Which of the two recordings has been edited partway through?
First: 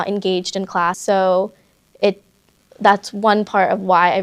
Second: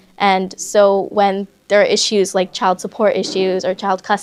first; 1 cut; at 1.0 s

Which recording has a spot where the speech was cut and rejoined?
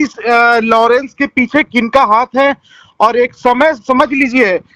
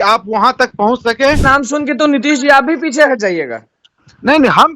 second; 1 cut; at 1.5 s

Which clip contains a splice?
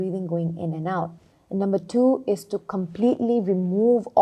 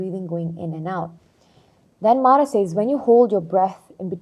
first; 1 cut; at 1.3 s

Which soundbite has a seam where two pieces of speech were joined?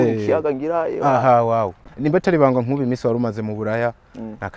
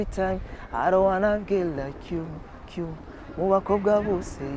first; 1 cut; at 1.8 s

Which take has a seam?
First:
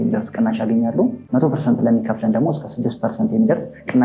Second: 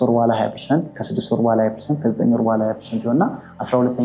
first; 1 cut; at 1.2 s

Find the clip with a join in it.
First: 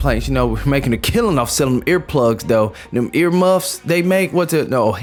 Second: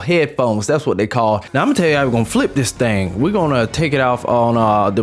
second; 1 cut; at 1.5 s

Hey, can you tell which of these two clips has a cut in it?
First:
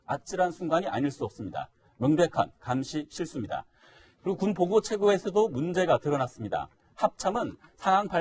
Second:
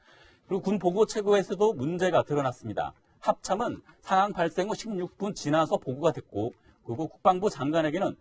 second; 1 cut; at 6.9 s

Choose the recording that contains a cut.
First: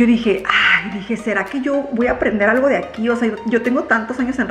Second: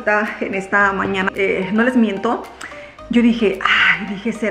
second; 1 cut; at 1.3 s

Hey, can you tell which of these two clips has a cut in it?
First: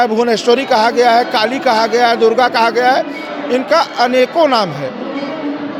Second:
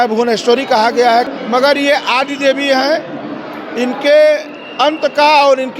second; 1 cut; at 1.3 s

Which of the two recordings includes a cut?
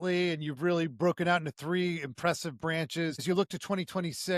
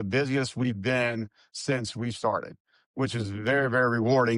first; 1 cut; at 3.2 s

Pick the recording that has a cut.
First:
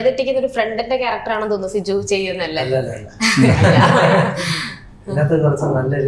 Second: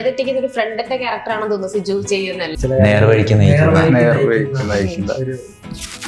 second; 1 cut; at 2.5 s

